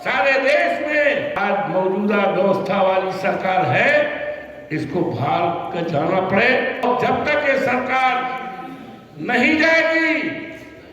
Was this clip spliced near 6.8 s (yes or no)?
yes